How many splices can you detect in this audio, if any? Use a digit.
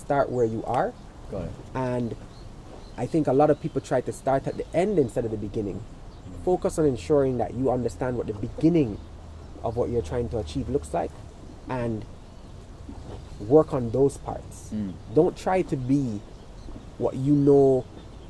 0